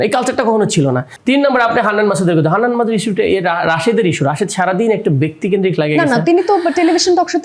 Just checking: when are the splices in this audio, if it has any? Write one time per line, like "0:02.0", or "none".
0:01.1